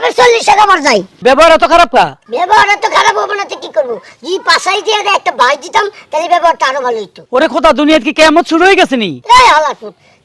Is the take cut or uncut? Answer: cut